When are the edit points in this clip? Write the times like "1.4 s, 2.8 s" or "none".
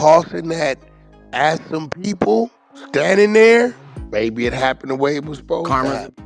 none

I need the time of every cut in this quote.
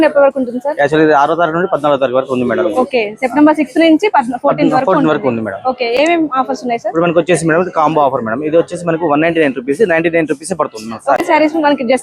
none

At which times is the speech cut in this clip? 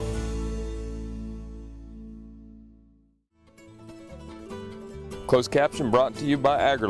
3.6 s, 4.8 s

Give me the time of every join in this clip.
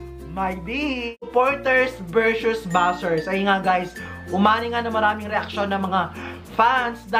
1.3 s

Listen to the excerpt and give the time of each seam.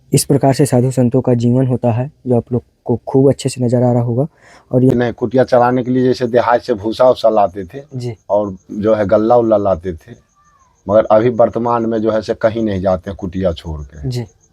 4.9 s

